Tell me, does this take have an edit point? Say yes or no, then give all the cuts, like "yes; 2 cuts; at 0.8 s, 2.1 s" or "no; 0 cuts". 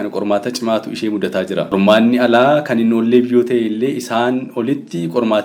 yes; 1 cut; at 1.7 s